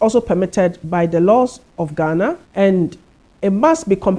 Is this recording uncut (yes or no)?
no